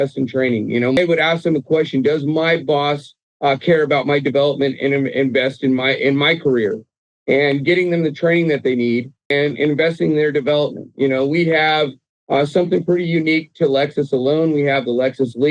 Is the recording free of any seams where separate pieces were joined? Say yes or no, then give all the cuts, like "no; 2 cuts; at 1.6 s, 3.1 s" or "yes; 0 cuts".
no; 2 cuts; at 1.0 s, 9.2 s